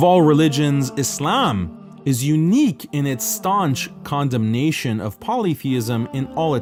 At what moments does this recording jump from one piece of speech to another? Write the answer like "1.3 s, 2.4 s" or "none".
none